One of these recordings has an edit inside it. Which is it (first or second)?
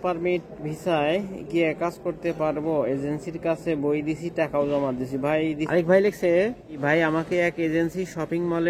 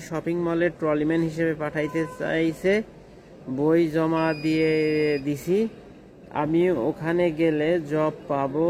first